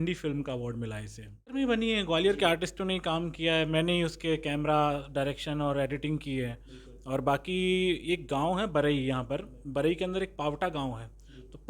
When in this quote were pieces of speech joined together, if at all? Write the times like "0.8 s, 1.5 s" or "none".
1.5 s